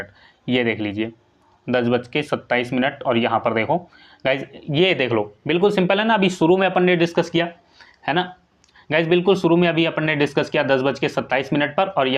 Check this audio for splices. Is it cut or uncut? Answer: uncut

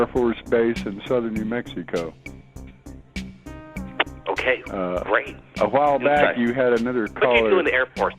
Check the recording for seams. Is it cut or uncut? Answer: cut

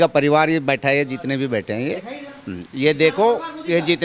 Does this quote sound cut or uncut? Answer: uncut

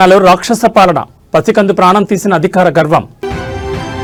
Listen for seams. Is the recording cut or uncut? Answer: uncut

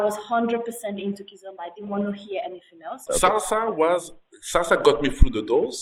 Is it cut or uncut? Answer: cut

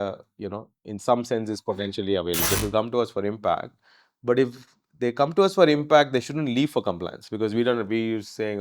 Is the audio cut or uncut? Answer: cut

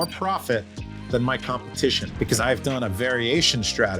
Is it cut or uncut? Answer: cut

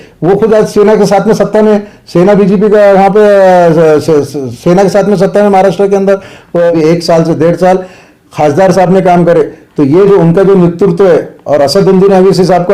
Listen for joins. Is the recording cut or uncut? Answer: cut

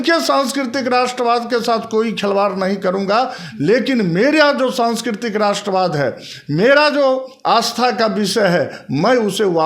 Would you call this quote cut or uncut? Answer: uncut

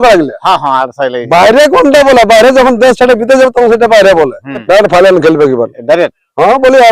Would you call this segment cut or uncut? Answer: cut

